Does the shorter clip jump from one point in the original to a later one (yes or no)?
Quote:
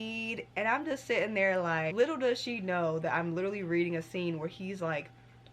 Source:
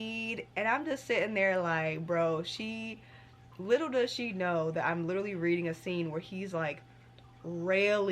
yes